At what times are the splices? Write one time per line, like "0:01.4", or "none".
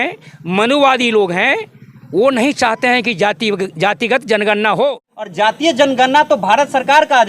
0:05.3

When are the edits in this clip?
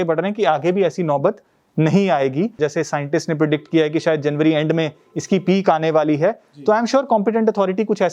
0:02.6

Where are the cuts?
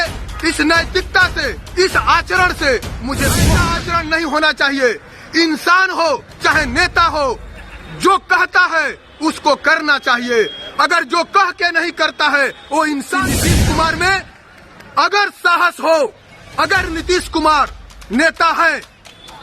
0:03.4
0:13.3

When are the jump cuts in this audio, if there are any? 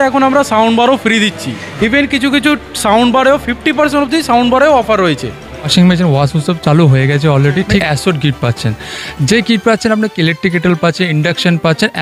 0:01.7
0:05.6
0:07.8

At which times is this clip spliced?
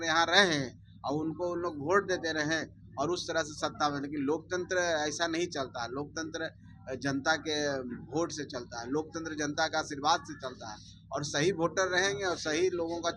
none

